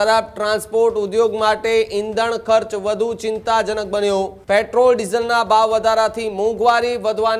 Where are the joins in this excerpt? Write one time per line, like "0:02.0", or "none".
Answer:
0:04.4